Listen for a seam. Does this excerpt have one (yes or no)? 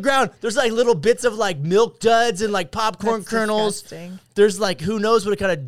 no